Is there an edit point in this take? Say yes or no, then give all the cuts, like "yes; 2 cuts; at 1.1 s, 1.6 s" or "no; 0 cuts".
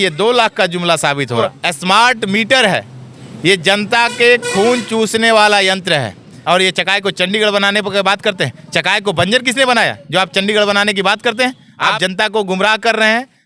yes; 3 cuts; at 1.5 s, 6.3 s, 11.9 s